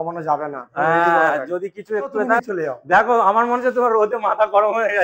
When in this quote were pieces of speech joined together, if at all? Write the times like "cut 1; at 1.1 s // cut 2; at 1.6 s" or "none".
cut 1; at 2.4 s